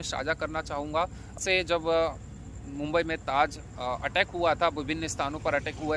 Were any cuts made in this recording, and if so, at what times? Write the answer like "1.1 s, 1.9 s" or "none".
1.4 s